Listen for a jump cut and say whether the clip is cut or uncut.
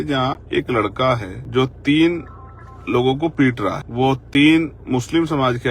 cut